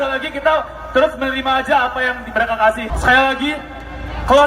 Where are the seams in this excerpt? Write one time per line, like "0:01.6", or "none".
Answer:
none